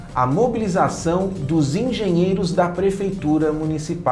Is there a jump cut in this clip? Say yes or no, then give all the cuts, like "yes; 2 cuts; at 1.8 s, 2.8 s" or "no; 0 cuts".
no; 0 cuts